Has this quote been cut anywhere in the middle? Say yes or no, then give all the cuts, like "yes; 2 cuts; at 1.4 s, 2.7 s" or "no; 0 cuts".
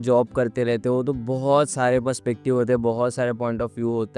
no; 0 cuts